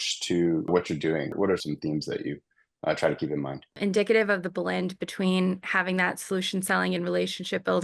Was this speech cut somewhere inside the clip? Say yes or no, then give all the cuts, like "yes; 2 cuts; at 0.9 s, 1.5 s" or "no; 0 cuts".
yes; 2 cuts; at 1.5 s, 3.7 s